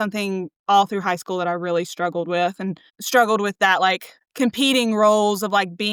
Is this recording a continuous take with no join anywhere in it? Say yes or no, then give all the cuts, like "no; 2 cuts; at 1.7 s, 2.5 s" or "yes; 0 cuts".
yes; 0 cuts